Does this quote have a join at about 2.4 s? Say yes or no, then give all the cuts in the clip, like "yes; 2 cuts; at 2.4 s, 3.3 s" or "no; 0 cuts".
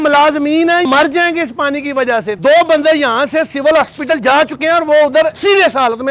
yes; 2 cuts; at 0.9 s, 2.4 s